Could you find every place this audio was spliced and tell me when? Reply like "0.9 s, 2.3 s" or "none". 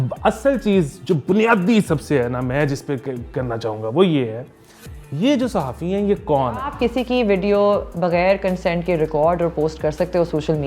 6.7 s